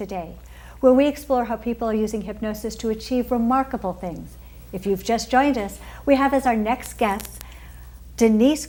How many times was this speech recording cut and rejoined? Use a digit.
0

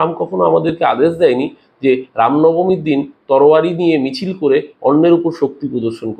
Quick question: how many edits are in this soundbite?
0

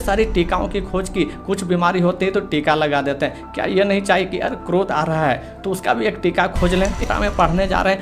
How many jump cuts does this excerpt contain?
1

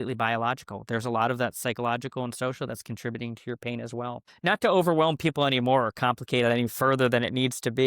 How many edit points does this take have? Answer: 1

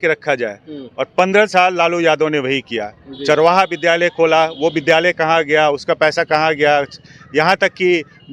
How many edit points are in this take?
0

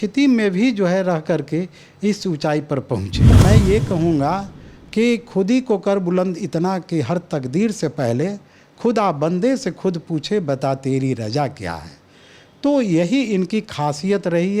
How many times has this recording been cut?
1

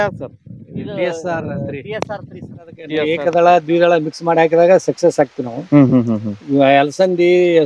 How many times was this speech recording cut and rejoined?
1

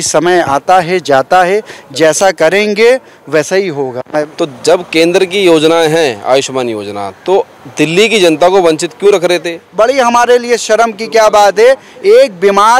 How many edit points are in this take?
2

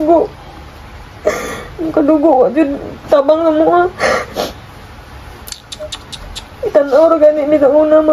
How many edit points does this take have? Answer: 0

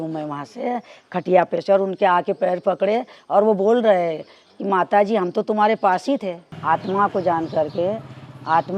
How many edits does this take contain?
1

